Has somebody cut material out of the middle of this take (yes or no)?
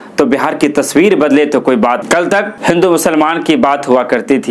yes